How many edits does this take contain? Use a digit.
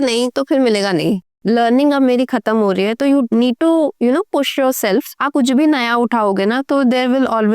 2